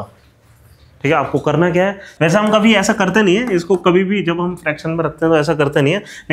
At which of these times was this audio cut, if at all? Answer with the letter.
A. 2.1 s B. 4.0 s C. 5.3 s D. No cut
A